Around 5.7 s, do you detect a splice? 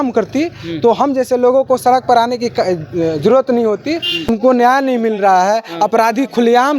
no; 1 cut; at 4.3 s

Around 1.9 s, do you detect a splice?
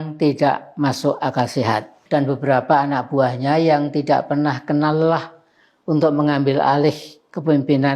yes; 1 cut; at 1.9 s

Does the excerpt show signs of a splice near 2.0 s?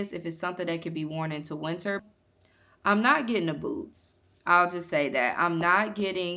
yes; 1 cut; at 2.0 s

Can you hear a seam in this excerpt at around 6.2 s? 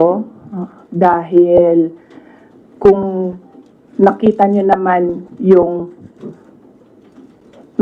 yes; 1 cut; at 6.2 s

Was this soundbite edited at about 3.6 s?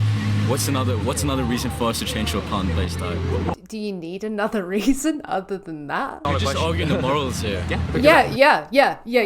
no; 1 cut; at 6.2 s

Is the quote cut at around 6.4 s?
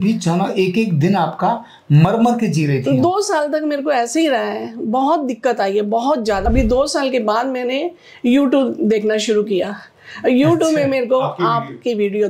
yes; 1 cut; at 6.4 s

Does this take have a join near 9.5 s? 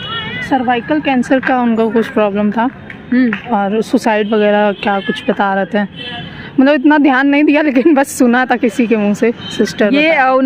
no; 0 cuts

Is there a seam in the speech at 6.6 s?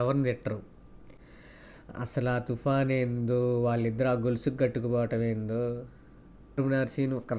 yes; 2 cuts; at 1.0 s, 6.6 s

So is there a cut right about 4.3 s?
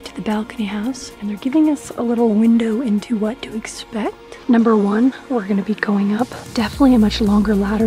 yes; 2 cuts; at 1.1 s, 4.3 s

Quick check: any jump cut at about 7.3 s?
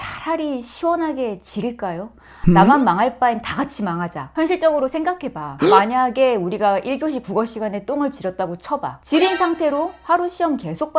no; 2 cuts; at 4.2 s, 8.9 s

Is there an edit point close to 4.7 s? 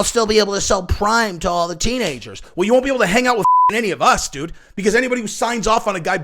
no; 1 cut; at 2.5 s

